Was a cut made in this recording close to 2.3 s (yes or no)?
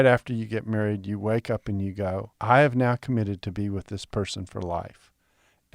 yes